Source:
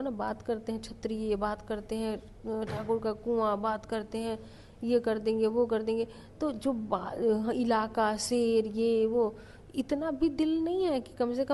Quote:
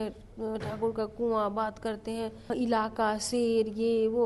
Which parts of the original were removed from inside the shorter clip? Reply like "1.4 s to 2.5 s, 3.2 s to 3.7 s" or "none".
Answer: 4.5 s to 7.5 s

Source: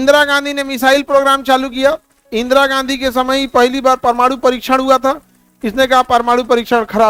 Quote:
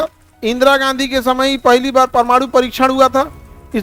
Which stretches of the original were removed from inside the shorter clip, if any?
none

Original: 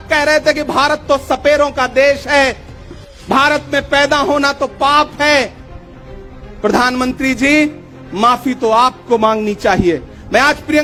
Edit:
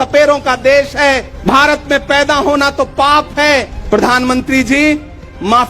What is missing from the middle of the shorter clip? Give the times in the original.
2.6 s to 3.1 s, 5.6 s to 6.5 s

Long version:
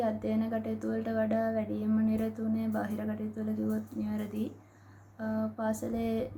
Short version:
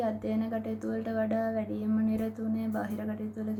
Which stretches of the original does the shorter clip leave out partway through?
none

